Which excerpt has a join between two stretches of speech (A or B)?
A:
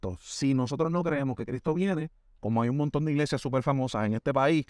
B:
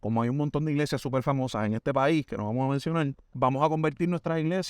B